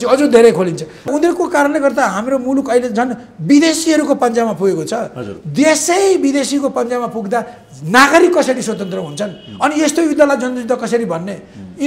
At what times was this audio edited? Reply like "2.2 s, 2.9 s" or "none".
1.1 s